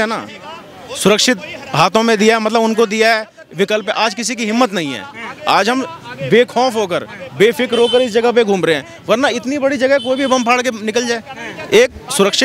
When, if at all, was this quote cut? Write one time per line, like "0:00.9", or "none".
none

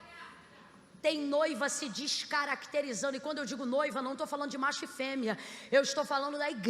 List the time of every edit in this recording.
none

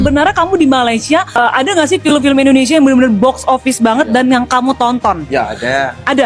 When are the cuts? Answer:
0:01.4

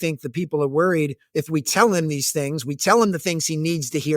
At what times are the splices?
0:01.4

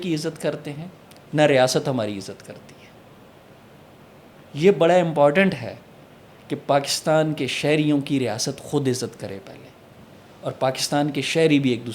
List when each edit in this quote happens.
none

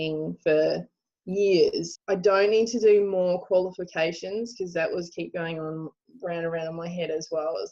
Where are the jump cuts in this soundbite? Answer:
0:01.9

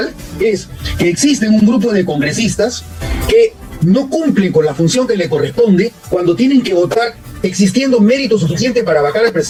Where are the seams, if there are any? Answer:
none

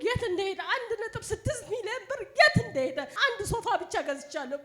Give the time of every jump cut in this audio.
0:03.1

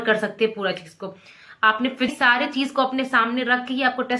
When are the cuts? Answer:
0:02.1

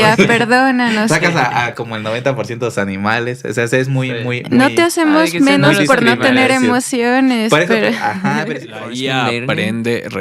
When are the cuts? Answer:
0:08.7

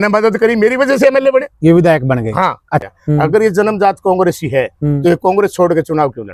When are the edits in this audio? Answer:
0:02.8

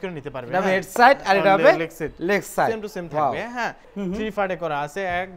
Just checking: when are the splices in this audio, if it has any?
0:03.8

